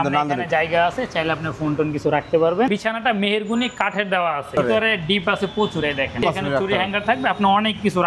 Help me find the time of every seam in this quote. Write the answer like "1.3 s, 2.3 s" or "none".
2.7 s, 4.5 s, 6.2 s

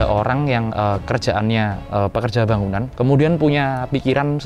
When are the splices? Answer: 1.8 s, 2.9 s

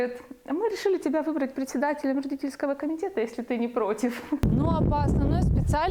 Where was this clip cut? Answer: 4.4 s

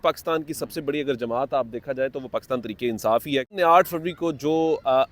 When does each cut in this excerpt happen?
3.5 s

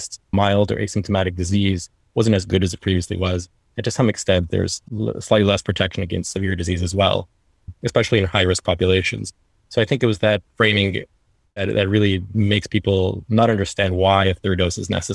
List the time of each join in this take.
4.8 s, 7.7 s

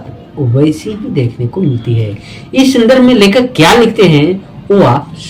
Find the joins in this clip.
none

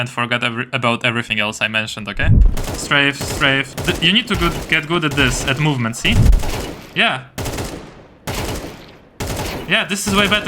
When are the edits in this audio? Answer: 2.5 s, 3.7 s, 6.3 s

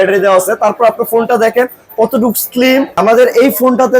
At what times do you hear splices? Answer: 3.0 s

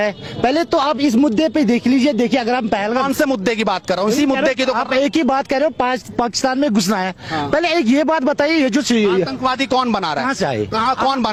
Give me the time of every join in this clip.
none

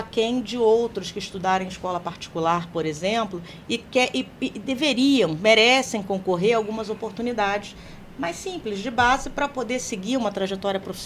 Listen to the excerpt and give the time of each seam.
none

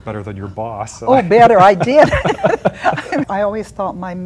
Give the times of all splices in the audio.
3.3 s

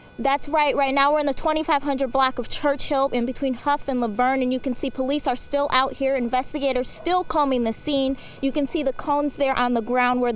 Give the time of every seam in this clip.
none

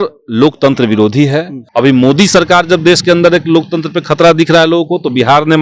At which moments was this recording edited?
1.6 s

